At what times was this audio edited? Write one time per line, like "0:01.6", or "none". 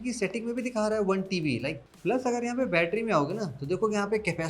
0:01.8